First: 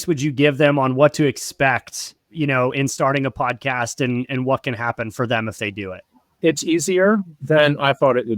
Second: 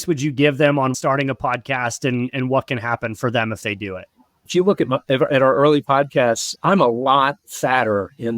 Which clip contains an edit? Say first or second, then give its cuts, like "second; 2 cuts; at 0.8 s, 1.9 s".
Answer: second; 2 cuts; at 0.9 s, 4.4 s